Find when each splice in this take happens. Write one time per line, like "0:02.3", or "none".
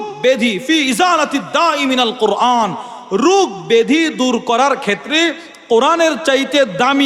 none